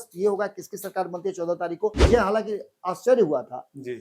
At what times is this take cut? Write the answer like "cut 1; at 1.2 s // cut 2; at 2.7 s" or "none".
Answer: cut 1; at 2.0 s